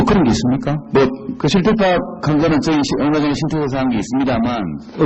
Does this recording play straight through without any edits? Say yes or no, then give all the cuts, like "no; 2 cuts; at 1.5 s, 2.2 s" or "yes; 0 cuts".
yes; 0 cuts